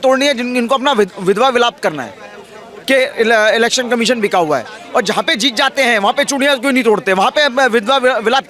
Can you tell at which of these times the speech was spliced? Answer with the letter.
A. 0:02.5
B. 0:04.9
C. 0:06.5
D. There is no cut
D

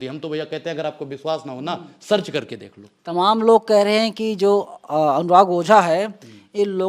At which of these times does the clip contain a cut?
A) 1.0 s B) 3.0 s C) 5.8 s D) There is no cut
D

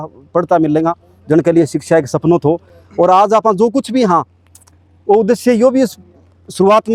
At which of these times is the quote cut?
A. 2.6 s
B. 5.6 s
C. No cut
C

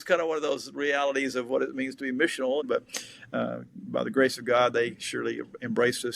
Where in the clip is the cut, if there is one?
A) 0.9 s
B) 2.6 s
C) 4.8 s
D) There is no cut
B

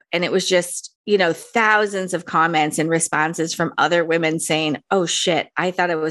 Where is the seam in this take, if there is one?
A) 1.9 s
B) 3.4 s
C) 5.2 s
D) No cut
D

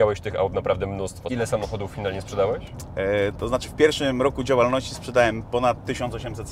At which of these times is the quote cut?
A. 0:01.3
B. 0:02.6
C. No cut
A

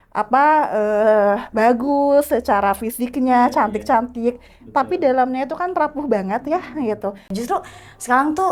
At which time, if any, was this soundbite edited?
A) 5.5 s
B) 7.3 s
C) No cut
B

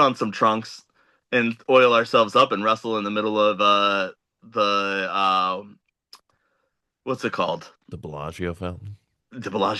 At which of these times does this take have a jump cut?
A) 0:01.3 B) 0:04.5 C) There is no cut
C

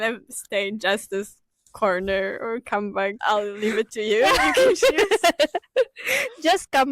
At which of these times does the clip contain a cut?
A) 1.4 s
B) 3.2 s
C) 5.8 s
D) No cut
B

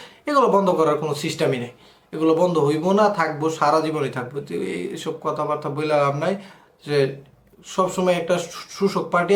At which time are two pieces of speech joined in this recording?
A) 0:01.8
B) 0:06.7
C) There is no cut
C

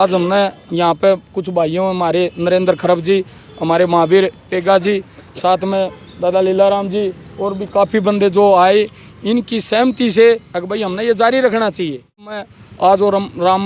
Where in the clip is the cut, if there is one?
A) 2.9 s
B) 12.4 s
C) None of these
B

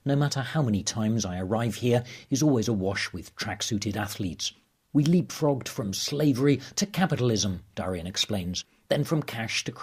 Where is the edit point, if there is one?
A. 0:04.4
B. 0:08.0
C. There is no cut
A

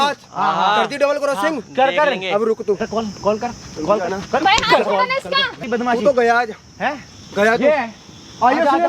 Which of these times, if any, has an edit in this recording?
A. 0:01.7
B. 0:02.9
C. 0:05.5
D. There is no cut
C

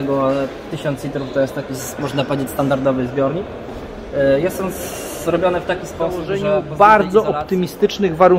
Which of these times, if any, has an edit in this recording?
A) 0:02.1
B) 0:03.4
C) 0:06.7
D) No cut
C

